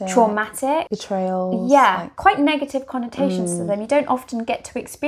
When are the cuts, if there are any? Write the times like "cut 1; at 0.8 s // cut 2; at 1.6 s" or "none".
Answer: cut 1; at 0.9 s // cut 2; at 2.1 s